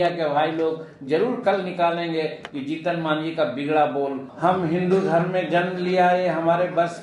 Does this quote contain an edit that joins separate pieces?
yes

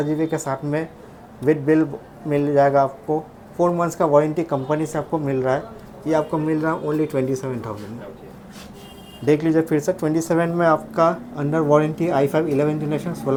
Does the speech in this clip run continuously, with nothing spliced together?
yes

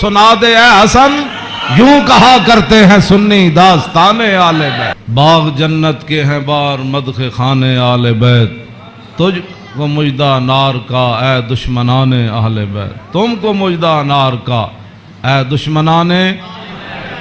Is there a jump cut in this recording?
yes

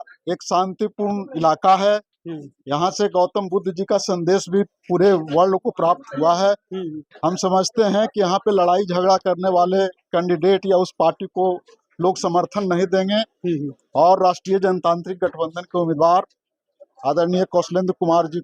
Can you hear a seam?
no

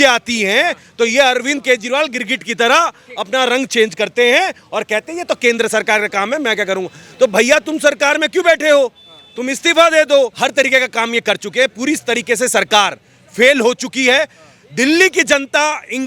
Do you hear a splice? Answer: yes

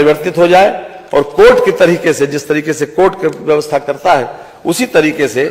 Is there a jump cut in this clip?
no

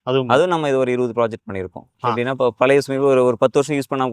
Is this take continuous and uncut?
no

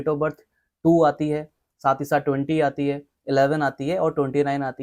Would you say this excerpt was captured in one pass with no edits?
yes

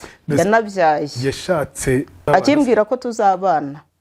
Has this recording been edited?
yes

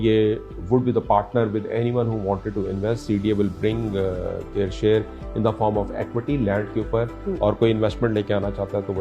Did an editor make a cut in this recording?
no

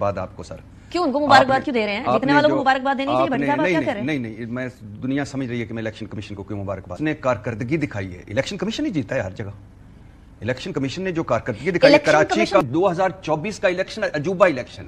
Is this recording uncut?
no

